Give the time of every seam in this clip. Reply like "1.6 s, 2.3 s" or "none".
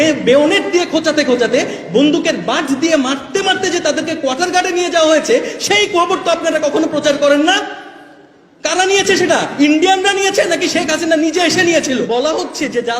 12.1 s